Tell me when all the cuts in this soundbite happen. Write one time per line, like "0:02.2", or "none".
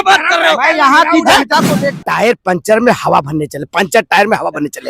0:02.0